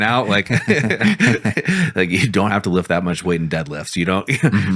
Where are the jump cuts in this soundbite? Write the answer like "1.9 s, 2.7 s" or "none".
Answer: none